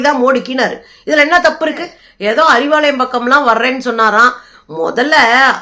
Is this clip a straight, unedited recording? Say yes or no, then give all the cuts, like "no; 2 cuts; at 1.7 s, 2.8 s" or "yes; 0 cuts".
no; 1 cut; at 2.0 s